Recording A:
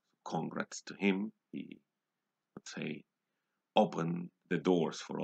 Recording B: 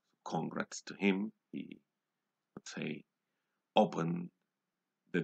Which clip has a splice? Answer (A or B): A